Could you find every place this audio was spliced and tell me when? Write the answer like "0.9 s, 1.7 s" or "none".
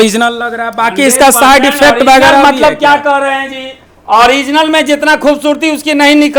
none